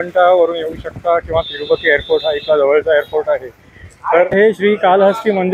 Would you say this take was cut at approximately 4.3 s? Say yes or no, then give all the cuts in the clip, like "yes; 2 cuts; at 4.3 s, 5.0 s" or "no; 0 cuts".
yes; 1 cut; at 4.3 s